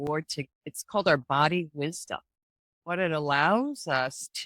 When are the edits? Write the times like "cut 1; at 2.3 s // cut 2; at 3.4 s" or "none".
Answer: cut 1; at 2.8 s